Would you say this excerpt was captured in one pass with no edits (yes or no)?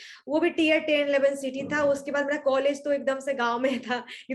yes